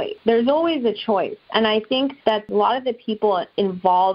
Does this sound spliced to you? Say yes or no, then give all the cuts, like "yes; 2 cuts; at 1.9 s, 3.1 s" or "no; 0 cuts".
yes; 1 cut; at 2.5 s